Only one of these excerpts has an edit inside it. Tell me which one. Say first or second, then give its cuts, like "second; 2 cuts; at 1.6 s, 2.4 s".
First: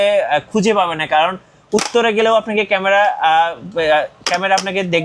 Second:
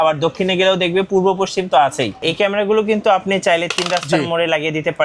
second; 1 cut; at 2.2 s